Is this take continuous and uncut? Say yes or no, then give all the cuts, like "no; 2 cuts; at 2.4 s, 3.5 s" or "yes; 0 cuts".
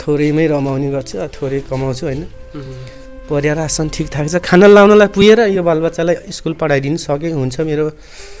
yes; 0 cuts